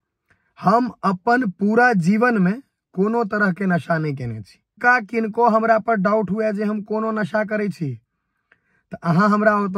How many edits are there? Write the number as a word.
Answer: one